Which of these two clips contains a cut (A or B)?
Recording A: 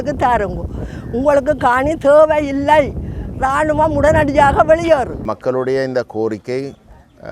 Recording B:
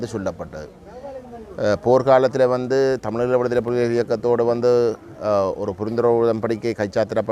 A